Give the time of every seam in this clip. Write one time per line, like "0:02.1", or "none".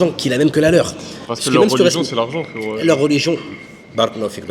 none